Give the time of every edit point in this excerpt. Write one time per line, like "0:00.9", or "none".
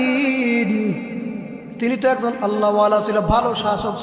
none